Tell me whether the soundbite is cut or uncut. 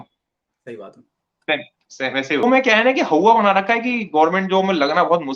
cut